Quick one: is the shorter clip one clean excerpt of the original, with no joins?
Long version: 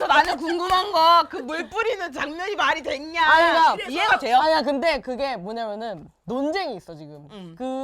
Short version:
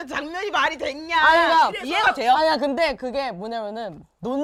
yes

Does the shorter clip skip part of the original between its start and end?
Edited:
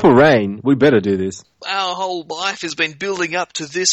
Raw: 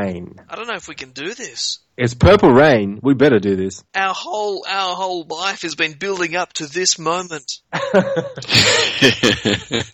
yes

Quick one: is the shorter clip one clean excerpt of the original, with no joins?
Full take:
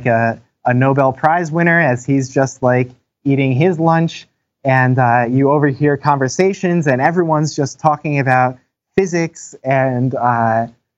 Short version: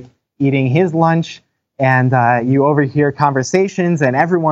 yes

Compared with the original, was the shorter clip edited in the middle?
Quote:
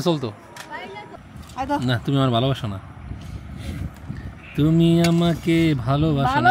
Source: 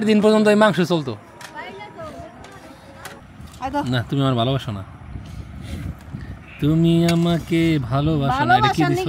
yes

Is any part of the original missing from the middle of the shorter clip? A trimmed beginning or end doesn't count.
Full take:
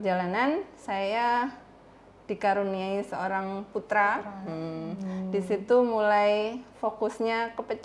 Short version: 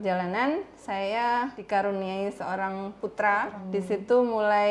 yes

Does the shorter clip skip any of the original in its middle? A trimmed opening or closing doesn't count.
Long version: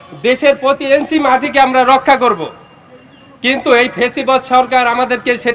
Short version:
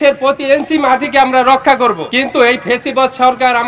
yes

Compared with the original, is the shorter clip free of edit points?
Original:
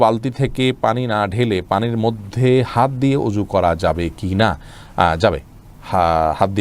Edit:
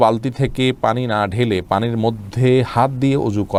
yes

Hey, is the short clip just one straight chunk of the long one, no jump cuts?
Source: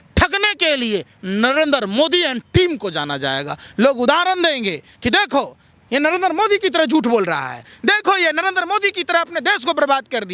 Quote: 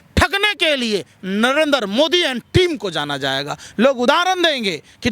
yes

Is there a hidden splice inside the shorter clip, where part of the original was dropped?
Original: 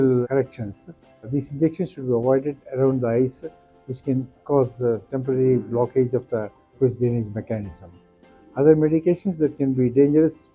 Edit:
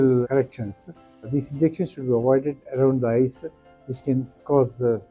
no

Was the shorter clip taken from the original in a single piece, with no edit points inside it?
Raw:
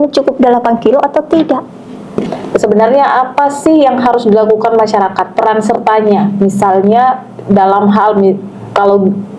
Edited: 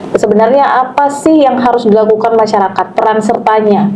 yes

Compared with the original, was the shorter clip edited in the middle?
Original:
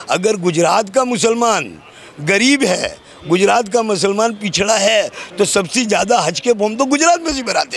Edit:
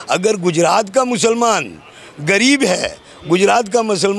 no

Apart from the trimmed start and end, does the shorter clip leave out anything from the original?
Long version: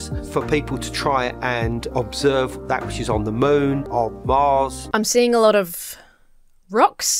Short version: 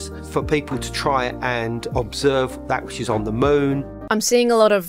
yes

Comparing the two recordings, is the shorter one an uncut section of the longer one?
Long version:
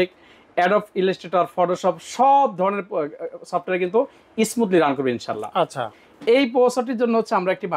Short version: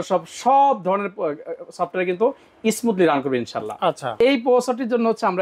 no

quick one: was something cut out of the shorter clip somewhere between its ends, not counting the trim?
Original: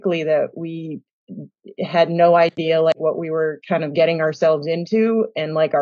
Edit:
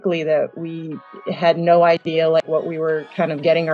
yes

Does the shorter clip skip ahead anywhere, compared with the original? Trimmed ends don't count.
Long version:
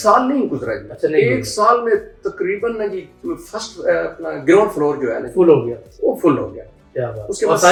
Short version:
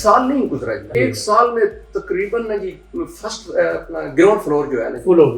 yes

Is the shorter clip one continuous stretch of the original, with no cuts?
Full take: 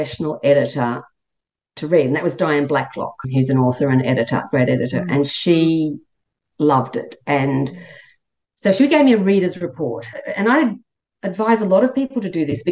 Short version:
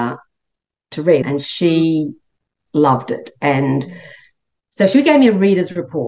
no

